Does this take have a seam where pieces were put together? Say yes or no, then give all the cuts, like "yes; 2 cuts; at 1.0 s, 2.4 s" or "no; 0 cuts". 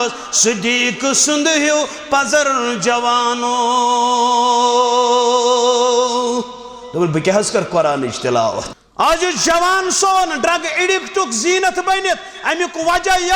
yes; 1 cut; at 8.7 s